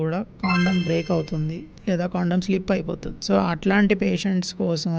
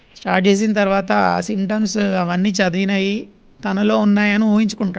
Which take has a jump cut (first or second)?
first